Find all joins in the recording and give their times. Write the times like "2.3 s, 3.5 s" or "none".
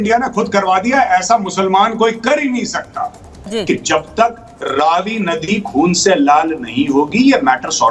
3.5 s